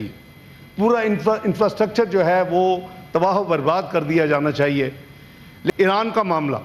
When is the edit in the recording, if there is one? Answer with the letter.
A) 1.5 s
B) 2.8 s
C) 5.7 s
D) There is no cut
C